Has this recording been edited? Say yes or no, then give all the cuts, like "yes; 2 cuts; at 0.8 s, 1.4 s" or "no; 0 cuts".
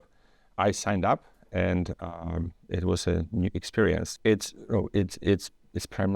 yes; 1 cut; at 4.1 s